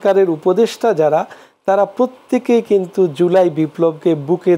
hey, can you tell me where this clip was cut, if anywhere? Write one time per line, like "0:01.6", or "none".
none

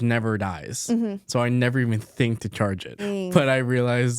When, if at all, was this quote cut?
0:03.0

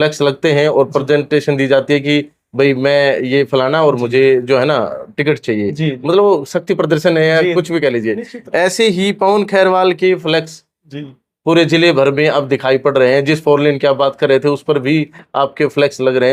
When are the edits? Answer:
none

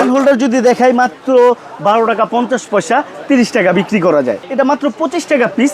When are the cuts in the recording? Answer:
0:04.4

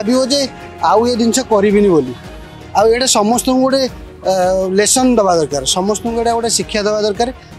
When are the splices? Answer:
none

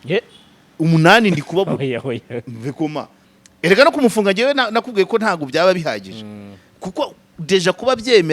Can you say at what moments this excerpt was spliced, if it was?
0:03.2

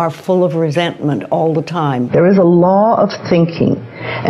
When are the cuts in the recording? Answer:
0:02.0

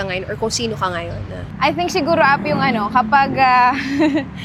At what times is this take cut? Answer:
none

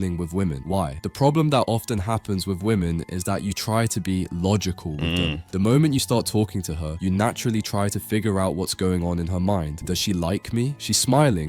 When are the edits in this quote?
0:05.4

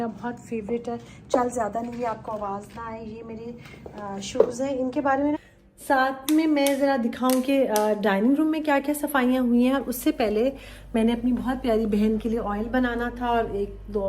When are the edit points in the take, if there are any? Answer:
0:05.4

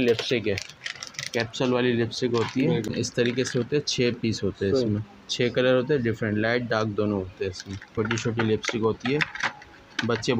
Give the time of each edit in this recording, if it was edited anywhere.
0:02.9
0:07.9

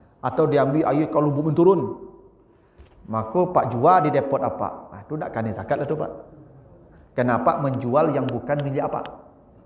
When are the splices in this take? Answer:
none

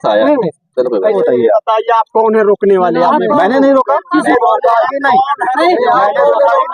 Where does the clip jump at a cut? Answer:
0:01.1
0:04.3

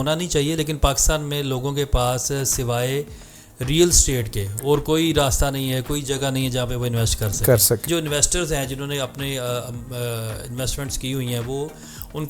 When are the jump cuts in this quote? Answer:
0:07.9

